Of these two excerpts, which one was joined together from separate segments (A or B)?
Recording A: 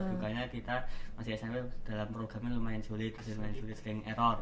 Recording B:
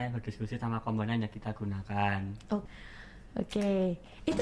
B